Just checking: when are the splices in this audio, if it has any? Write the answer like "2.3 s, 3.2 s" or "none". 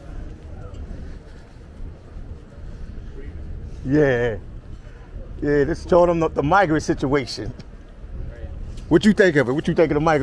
none